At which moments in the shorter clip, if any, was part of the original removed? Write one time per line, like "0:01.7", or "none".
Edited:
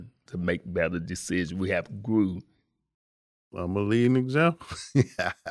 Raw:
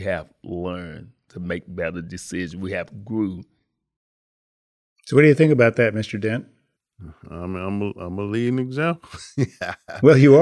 0:03.5